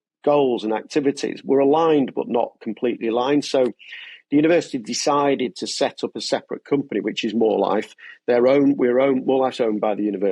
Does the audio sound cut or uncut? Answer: uncut